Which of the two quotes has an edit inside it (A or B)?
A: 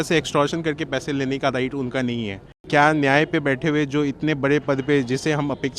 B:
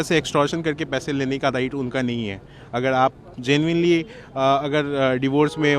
A